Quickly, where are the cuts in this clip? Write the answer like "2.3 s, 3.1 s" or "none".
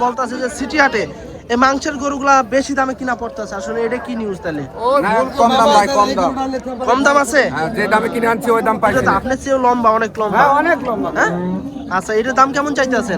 9.2 s